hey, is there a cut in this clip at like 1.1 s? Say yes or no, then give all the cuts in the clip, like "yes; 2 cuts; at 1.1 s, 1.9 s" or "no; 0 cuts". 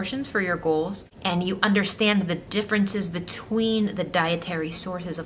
yes; 1 cut; at 1.1 s